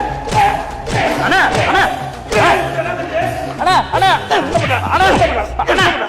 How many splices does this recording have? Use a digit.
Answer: 1